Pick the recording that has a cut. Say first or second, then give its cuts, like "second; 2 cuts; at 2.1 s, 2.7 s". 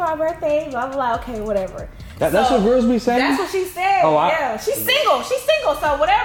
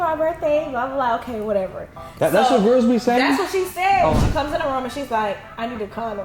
second; 1 cut; at 4.1 s